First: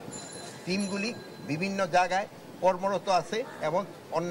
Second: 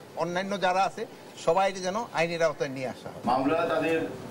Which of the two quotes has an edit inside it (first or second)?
second